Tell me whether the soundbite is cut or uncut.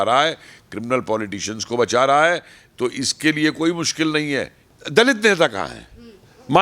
cut